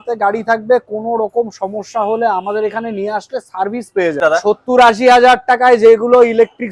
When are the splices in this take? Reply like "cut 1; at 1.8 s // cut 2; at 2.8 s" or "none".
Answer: cut 1; at 4.2 s